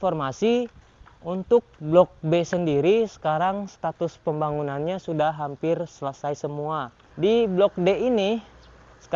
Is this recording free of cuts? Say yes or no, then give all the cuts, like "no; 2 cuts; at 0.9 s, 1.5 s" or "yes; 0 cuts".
no; 1 cut; at 7.0 s